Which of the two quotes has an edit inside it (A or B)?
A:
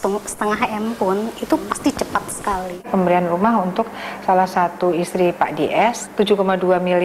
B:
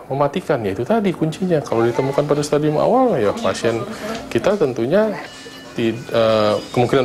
A